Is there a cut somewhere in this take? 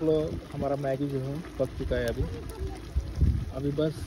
no; 0 cuts

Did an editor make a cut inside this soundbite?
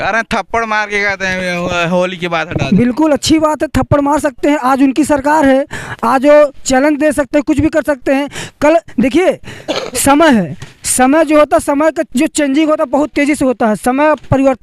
no; 0 cuts

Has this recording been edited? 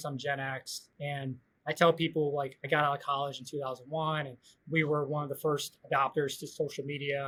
no; 0 cuts

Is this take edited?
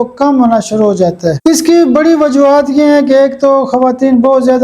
yes; 1 cut; at 1.4 s

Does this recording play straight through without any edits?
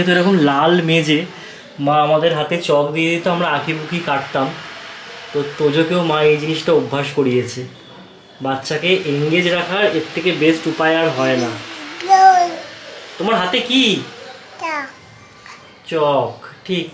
yes; 0 cuts

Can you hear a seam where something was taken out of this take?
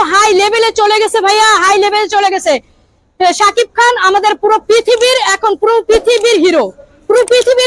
no; 0 cuts

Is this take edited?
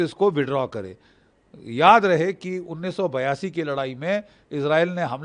no; 0 cuts

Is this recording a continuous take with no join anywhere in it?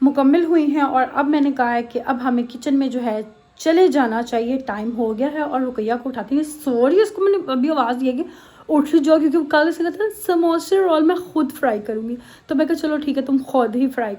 yes; 0 cuts

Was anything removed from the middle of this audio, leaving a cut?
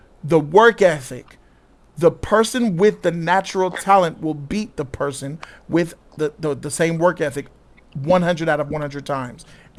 no; 0 cuts

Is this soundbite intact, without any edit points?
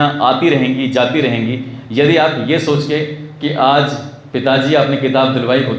yes; 0 cuts

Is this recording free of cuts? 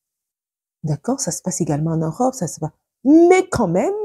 yes; 0 cuts

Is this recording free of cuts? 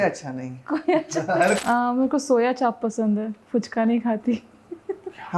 no; 1 cut; at 1.5 s

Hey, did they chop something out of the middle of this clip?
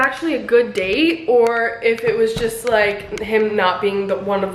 no; 0 cuts

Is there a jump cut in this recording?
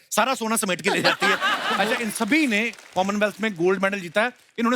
yes; 1 cut; at 1.7 s

